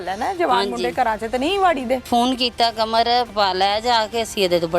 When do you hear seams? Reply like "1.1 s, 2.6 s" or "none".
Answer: 2.0 s, 3.3 s